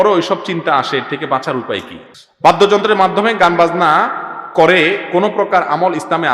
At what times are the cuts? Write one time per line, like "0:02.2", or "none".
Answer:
0:02.0

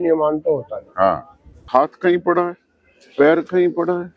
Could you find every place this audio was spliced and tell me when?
0:01.6

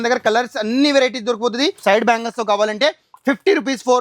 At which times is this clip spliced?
0:01.8

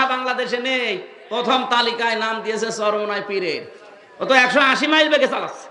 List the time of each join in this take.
none

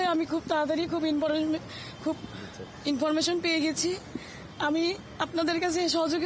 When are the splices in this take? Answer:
none

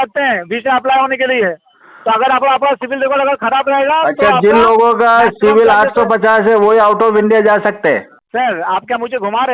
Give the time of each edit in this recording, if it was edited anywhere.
0:08.2

